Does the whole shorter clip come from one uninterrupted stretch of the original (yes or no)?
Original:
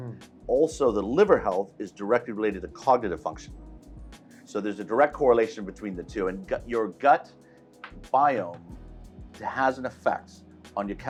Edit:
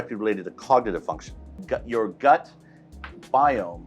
no